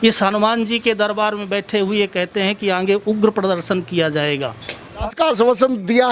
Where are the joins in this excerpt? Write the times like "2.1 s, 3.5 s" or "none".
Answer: 5.0 s